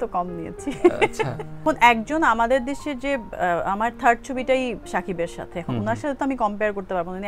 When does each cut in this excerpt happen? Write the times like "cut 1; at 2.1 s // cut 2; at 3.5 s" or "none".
none